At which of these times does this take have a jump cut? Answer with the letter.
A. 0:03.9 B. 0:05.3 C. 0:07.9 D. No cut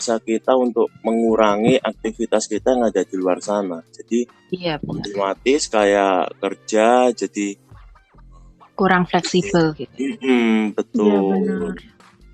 D